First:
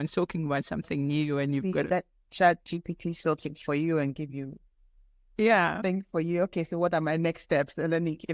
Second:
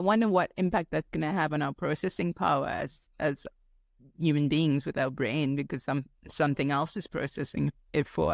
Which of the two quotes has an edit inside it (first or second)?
first